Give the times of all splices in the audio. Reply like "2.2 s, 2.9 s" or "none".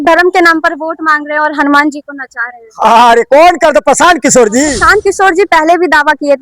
4.8 s